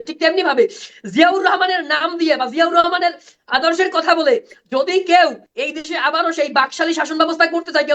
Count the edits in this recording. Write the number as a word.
one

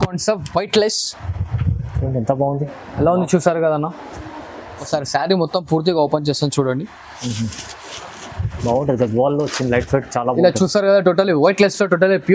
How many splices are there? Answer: one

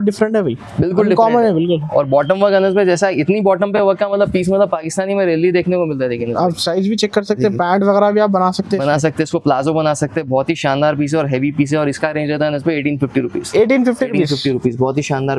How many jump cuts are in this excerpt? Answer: zero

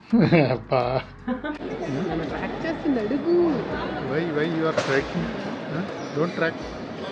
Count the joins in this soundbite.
one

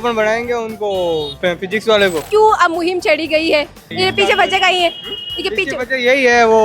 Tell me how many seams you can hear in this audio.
one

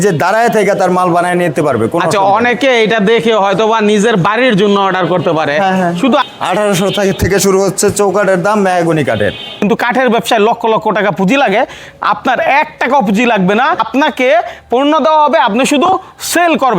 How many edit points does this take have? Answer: three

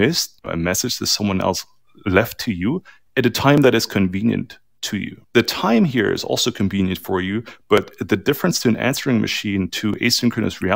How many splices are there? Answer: zero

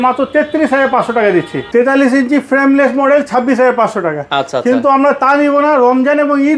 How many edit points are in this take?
one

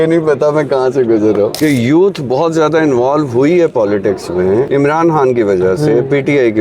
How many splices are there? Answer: two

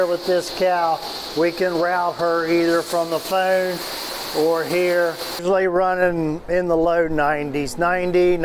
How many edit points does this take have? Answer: one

